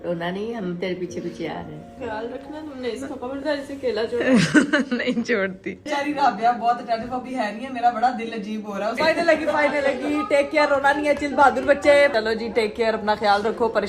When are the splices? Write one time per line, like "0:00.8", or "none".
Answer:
0:02.0
0:05.8
0:09.0
0:12.1